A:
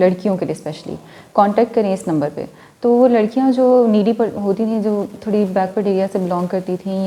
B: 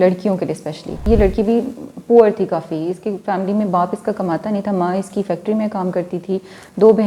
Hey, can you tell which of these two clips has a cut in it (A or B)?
B